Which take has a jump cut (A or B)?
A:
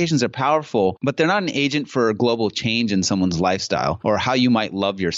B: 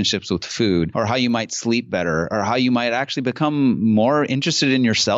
A